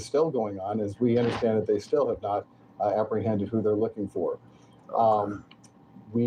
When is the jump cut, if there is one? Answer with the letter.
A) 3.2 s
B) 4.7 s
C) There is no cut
C